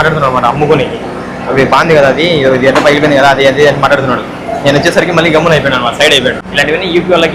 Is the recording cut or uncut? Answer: cut